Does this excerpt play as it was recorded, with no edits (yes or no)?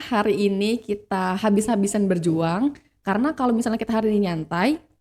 yes